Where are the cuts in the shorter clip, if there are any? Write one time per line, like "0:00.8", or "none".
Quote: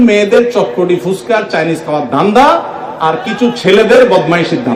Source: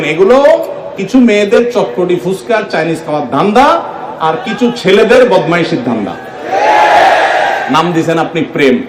none